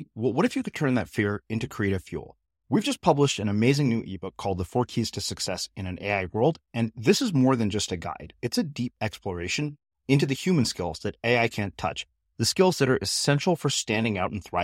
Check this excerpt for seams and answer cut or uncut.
uncut